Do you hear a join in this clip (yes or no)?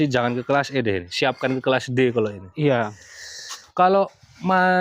yes